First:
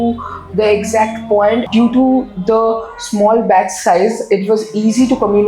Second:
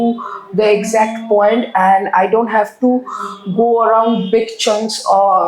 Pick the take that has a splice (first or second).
first